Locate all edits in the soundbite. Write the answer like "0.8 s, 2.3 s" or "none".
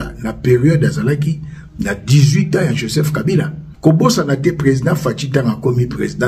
3.6 s